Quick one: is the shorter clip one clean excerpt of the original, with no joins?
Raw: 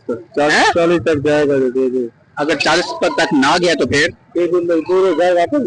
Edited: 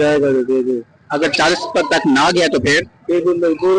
yes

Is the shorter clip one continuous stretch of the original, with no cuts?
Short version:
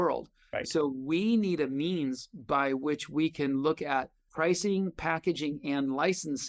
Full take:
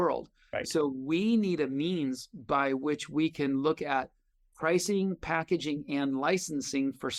no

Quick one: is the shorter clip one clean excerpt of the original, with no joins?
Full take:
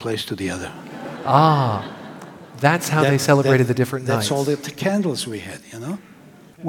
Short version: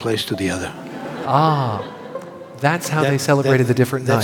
yes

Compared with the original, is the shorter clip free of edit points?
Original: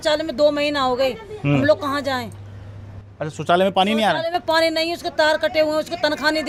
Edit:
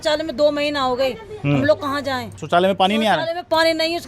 no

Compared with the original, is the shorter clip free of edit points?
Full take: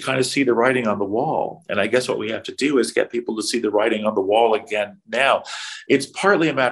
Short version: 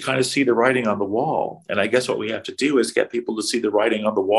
yes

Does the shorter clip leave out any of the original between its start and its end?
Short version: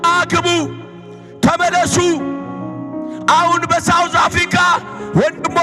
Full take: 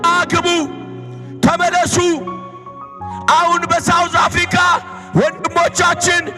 no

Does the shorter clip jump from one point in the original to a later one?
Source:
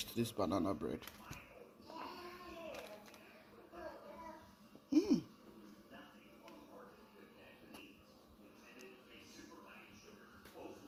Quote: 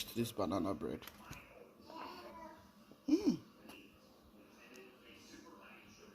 yes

